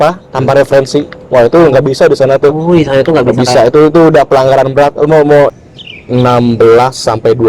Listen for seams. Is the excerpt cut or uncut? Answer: cut